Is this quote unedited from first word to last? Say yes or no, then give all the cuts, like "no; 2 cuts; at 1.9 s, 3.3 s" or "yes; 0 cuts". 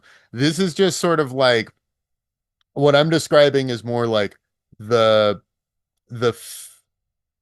yes; 0 cuts